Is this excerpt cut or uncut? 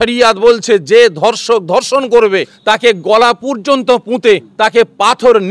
cut